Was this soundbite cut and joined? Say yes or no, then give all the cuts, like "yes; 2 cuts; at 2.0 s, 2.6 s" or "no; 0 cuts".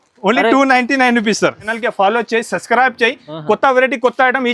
yes; 1 cut; at 1.7 s